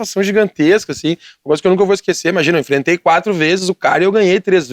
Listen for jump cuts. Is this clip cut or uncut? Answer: uncut